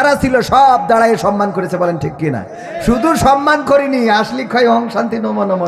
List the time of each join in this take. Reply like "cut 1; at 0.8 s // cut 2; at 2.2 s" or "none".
none